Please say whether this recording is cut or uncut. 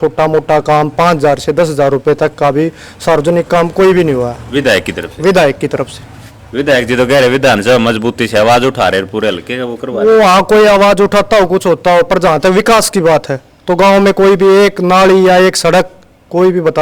uncut